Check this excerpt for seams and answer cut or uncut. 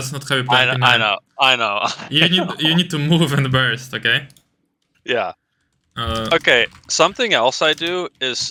uncut